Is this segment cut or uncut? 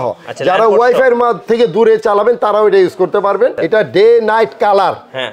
cut